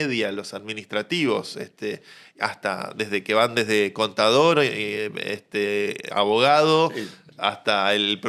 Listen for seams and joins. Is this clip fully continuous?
yes; 0 cuts

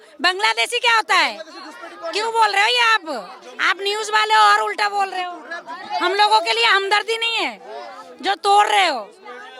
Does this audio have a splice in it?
no; 0 cuts

